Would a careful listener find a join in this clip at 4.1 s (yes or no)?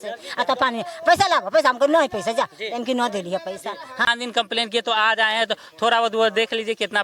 yes